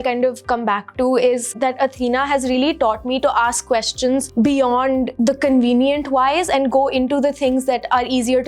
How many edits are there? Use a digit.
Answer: 0